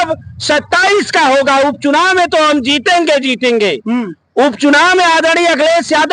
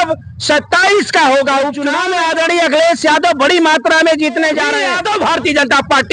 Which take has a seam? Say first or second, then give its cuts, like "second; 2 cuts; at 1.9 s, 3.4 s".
second; 2 cuts; at 2.0 s, 4.8 s